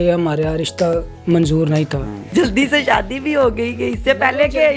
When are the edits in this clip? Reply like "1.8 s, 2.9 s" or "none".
2.3 s